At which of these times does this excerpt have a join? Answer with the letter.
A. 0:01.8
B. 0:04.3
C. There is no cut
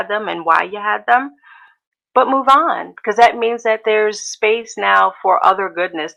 C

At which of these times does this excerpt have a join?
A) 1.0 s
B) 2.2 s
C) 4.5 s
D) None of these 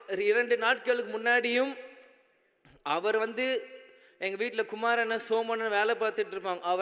D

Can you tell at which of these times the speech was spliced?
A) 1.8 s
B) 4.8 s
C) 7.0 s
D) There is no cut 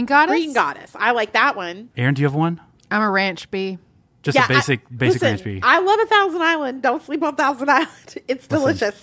A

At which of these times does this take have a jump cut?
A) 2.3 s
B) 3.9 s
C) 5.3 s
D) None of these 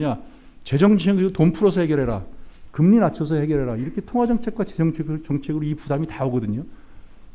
D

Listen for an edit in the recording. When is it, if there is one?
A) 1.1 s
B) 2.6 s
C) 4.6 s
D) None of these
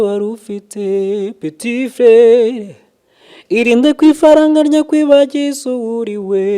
D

